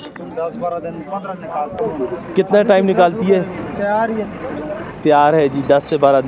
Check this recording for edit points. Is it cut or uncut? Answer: cut